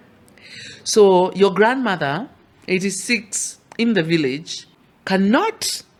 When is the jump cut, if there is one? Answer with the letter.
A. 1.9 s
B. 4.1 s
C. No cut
C